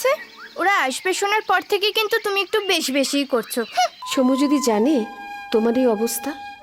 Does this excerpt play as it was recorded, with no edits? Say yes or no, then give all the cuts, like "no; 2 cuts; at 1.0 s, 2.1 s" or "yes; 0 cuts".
no; 1 cut; at 4.0 s